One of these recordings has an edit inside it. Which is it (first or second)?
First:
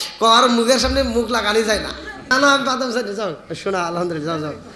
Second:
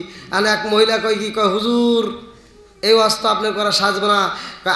first